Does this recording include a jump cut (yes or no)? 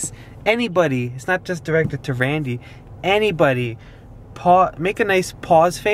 no